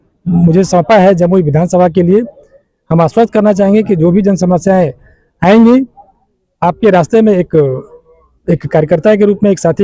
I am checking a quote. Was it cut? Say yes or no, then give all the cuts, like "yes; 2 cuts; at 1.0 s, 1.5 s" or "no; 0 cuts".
no; 0 cuts